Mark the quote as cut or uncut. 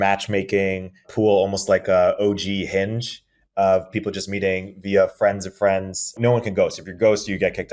cut